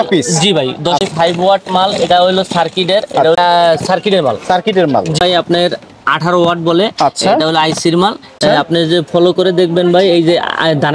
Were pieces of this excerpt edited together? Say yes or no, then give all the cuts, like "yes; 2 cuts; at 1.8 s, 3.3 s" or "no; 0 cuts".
yes; 4 cuts; at 1.0 s, 3.4 s, 5.2 s, 8.3 s